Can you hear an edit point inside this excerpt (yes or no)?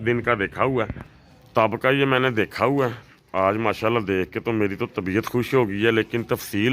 no